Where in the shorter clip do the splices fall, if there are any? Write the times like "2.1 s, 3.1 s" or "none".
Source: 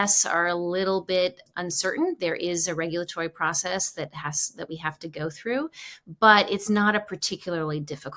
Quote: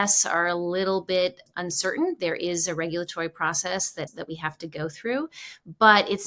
4.1 s